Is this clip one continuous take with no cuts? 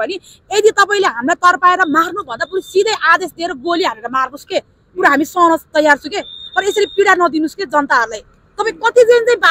yes; 0 cuts

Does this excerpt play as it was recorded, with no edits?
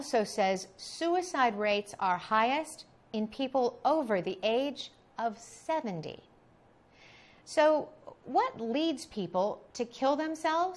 no; 1 cut; at 8.0 s

